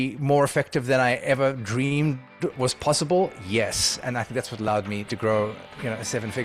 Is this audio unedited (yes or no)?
no